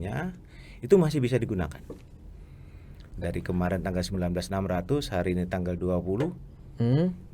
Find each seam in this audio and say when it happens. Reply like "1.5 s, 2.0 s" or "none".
3.1 s

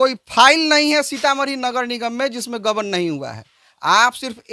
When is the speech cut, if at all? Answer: none

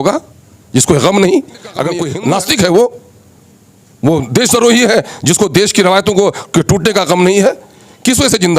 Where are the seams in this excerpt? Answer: 2.1 s

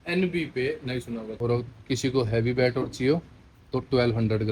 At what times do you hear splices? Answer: 1.3 s

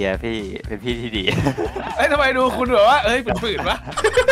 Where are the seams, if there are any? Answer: none

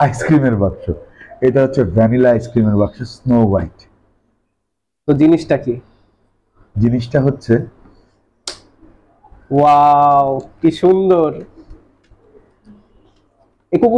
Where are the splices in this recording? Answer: none

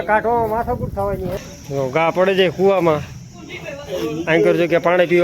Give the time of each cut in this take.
1.5 s

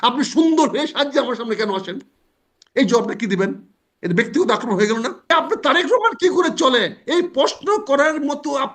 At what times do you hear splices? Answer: 5.3 s

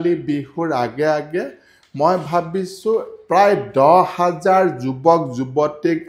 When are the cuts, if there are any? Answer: none

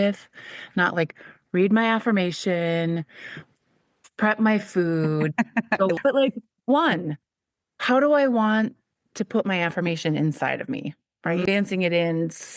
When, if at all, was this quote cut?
6.0 s, 11.5 s

